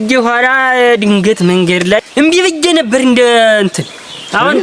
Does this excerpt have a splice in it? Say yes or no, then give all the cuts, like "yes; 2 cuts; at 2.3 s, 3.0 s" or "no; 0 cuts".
yes; 1 cut; at 2.0 s